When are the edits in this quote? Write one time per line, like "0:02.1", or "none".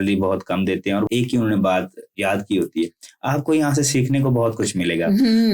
0:01.1
0:02.1

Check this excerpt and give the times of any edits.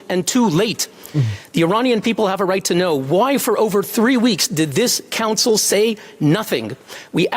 0:03.2
0:06.4

